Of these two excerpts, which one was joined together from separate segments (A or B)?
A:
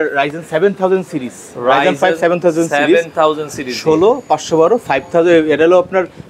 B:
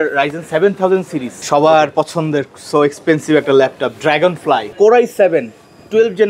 B